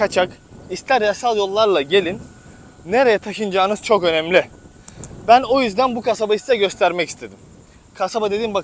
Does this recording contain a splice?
no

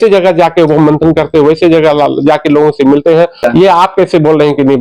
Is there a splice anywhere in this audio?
yes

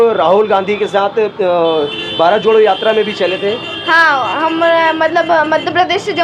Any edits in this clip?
no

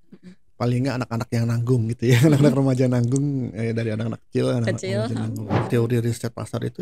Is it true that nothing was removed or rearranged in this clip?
no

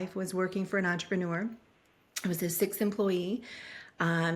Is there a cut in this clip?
no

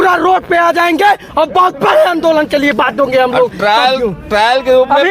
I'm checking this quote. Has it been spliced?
no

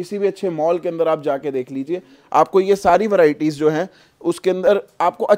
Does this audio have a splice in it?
no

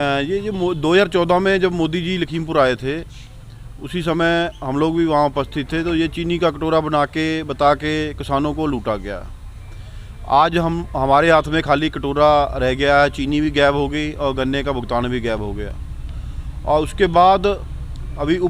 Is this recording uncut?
yes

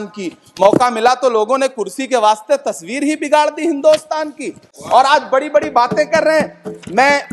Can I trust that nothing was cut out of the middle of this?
yes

